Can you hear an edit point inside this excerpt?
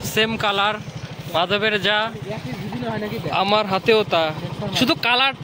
no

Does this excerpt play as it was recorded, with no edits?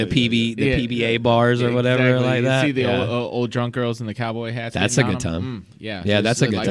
yes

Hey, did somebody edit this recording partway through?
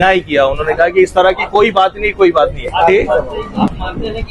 yes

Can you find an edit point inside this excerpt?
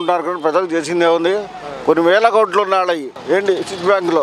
yes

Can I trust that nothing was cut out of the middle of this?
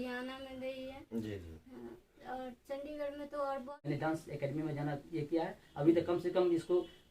no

